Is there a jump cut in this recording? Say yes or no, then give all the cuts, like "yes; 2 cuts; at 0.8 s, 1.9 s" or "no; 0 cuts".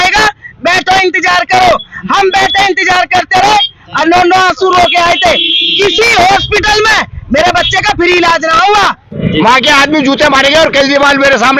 yes; 1 cut; at 9.1 s